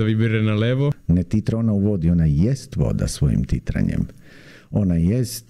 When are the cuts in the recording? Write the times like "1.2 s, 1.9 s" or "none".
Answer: 1.0 s

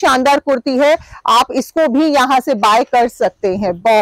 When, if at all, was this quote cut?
none

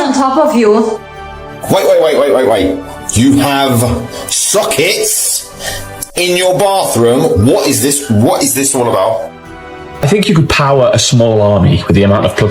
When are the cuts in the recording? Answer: 1.2 s, 9.7 s

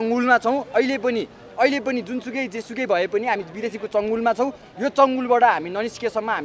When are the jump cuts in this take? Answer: none

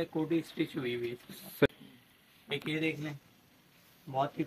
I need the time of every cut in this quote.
1.7 s

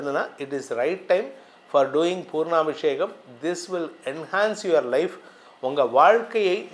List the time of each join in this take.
none

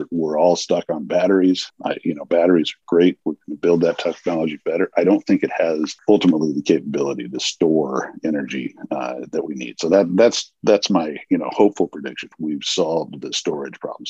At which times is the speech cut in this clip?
1.7 s, 5.9 s, 12.3 s

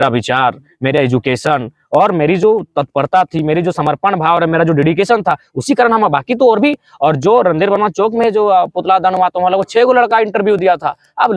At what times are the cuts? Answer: none

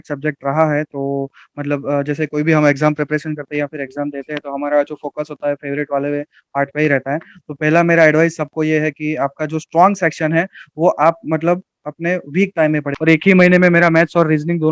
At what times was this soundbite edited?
12.9 s

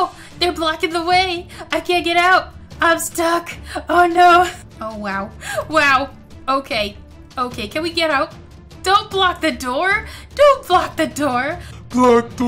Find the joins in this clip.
none

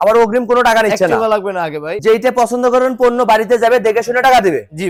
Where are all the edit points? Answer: none

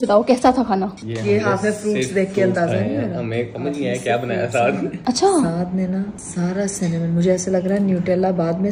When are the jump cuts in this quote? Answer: none

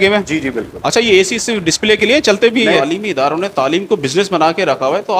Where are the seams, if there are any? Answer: 2.8 s

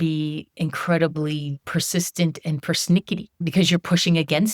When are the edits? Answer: 1.6 s, 3.3 s

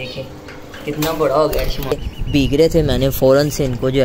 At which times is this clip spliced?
2.0 s

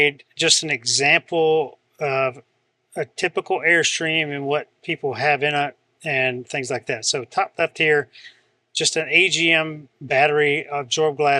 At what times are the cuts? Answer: none

